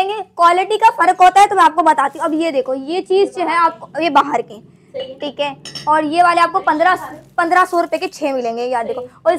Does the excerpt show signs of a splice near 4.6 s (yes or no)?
no